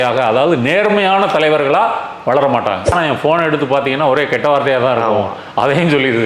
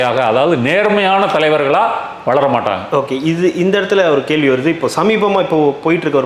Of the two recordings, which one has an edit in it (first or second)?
first